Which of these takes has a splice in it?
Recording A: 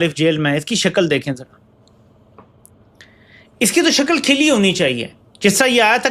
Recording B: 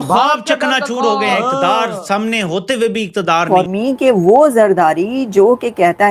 B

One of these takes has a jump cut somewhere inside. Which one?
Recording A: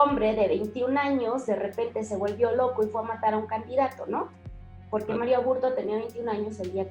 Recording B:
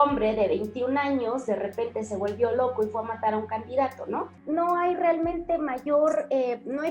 B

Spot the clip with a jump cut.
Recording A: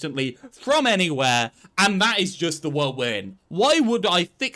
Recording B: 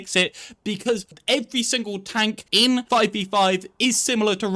B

